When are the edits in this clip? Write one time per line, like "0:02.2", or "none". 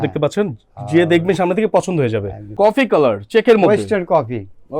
0:02.5